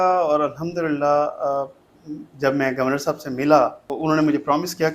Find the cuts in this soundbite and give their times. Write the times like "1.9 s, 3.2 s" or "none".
3.9 s